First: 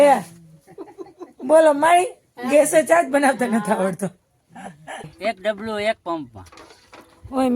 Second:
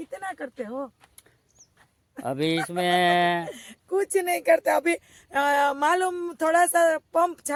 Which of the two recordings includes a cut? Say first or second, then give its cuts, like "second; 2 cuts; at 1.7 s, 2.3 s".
first; 1 cut; at 5.1 s